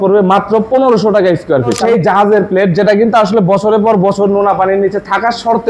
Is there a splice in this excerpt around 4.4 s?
no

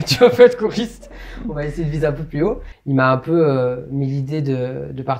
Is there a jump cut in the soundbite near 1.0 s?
no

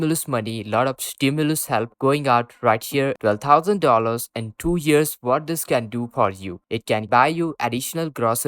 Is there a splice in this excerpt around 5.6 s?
no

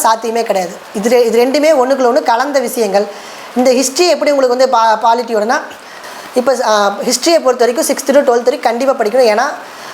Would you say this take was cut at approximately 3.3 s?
no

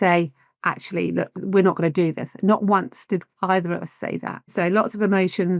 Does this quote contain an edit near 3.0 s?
no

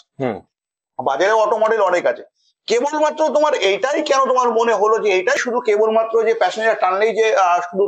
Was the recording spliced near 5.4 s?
yes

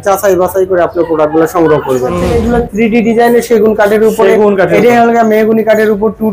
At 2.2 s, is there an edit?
yes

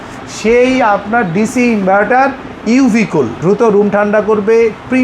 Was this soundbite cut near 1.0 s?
no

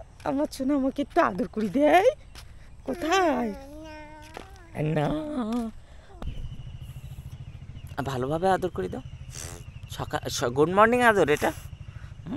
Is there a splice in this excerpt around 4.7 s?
no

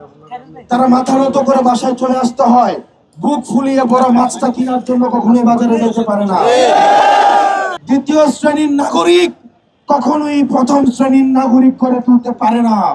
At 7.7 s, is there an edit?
yes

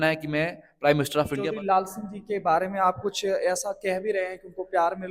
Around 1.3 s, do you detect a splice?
yes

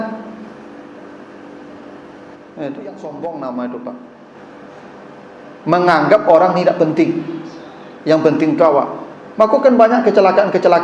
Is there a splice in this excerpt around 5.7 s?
no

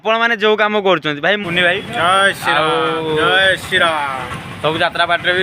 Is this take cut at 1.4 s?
yes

